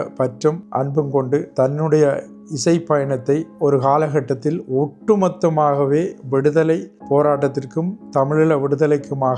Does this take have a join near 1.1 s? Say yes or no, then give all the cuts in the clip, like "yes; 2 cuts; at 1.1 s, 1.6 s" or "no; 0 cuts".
yes; 3 cuts; at 1.1 s, 3.5 s, 6.9 s